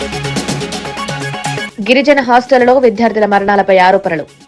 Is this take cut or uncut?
cut